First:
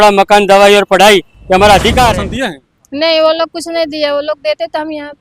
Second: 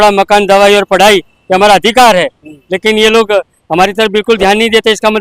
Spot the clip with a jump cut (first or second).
first